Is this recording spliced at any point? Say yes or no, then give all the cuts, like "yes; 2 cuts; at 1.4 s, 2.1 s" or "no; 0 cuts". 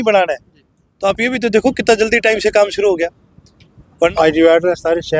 yes; 1 cut; at 4.1 s